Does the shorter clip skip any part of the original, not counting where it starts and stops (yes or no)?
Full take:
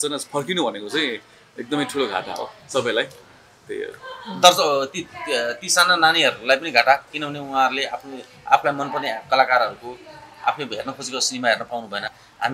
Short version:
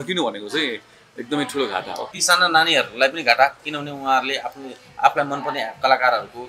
yes